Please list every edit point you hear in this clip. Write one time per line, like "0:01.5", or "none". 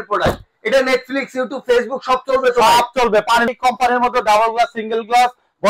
0:03.5